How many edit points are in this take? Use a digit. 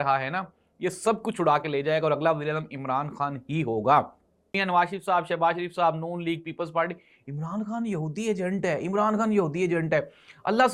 1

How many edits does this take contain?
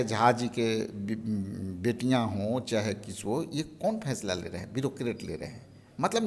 0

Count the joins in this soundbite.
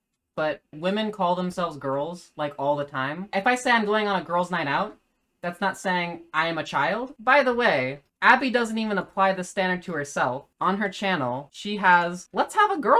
1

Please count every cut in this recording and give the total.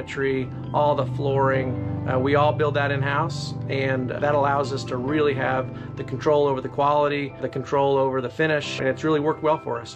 3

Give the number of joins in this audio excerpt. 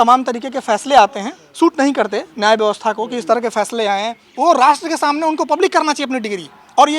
2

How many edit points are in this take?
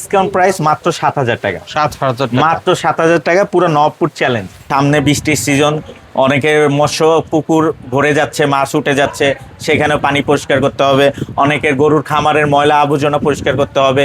1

